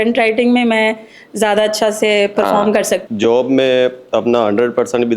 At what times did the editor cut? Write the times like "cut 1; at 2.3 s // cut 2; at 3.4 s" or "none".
cut 1; at 3.0 s